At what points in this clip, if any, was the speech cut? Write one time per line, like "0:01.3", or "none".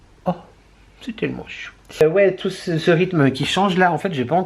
none